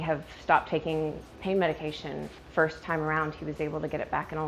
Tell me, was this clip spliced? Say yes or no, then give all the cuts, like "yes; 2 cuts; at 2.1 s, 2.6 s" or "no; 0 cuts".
yes; 2 cuts; at 1.3 s, 2.3 s